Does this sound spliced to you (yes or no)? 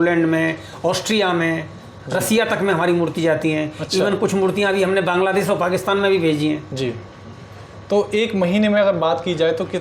no